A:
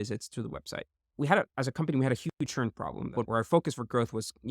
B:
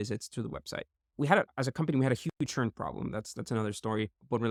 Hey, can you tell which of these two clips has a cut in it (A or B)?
A